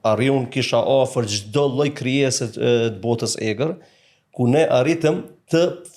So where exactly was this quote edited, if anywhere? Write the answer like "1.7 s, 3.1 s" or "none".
none